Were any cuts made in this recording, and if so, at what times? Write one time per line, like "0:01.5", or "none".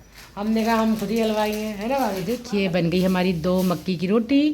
0:02.2